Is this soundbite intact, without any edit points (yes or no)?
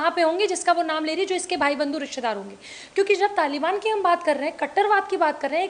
yes